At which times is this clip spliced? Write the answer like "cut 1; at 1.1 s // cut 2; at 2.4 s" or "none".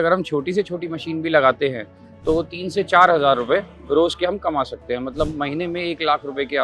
none